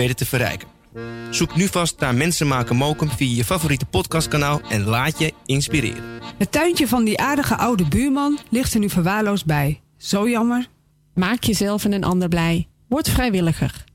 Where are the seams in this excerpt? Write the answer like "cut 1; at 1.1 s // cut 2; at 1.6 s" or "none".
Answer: cut 1; at 6.2 s